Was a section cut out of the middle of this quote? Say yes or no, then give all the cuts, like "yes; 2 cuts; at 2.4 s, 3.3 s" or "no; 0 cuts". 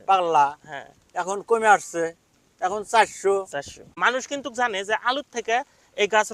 yes; 1 cut; at 4.0 s